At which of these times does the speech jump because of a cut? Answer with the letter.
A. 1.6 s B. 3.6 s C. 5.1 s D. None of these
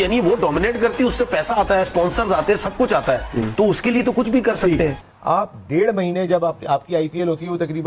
C